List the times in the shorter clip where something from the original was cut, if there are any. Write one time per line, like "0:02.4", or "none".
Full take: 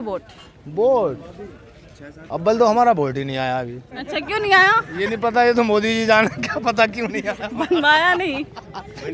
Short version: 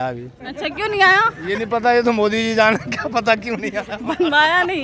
none